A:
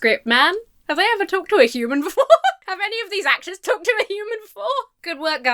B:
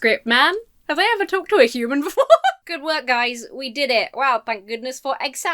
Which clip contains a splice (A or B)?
B